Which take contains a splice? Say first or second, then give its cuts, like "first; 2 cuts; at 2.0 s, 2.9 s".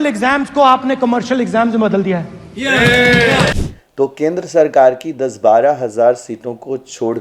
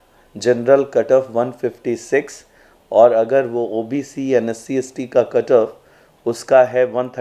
first; 1 cut; at 3.5 s